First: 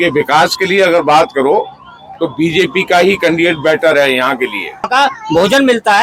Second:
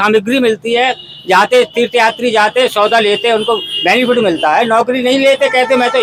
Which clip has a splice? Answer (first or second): first